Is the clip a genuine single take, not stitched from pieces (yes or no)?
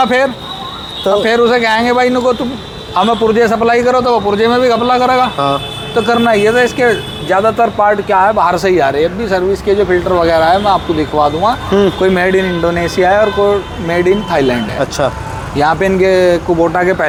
yes